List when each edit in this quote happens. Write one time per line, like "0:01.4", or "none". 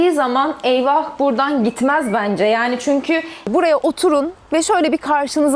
0:03.4